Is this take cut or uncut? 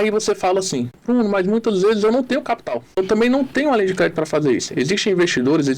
cut